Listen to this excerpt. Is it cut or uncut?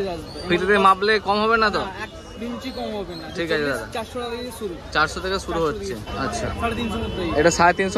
cut